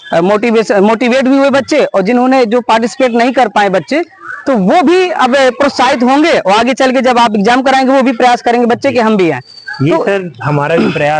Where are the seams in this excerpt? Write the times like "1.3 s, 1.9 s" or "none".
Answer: none